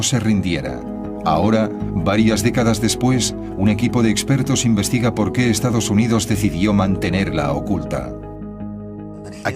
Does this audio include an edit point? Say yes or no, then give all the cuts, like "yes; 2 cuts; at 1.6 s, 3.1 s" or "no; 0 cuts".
yes; 1 cut; at 3.2 s